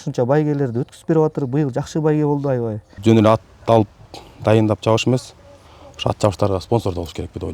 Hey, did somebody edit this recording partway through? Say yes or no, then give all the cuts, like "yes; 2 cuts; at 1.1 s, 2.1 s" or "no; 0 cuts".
yes; 1 cut; at 2.9 s